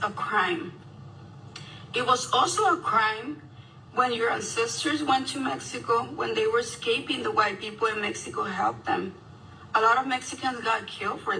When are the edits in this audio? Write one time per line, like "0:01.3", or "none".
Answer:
none